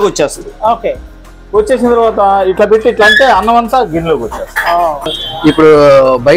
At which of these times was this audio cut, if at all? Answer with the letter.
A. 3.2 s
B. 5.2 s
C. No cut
B